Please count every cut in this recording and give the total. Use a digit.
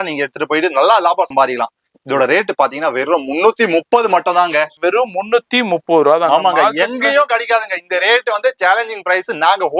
2